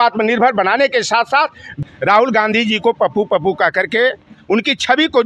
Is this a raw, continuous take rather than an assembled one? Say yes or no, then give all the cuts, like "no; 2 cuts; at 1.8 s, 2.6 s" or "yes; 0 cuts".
no; 1 cut; at 1.7 s